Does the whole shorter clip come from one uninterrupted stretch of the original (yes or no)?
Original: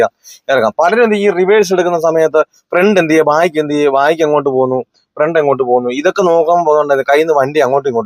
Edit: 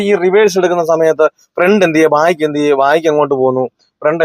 yes